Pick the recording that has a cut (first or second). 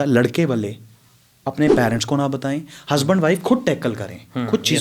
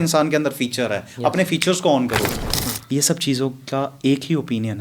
second